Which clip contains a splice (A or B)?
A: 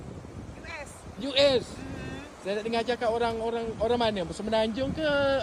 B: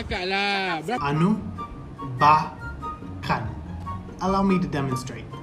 B